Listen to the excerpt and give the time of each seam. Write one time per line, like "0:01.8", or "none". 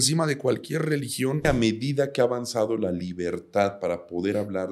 0:01.4